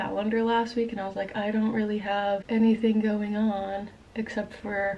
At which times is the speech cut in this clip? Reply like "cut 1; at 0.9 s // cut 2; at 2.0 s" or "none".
cut 1; at 2.4 s